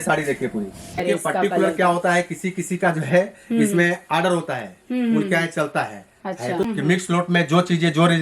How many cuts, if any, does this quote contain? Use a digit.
2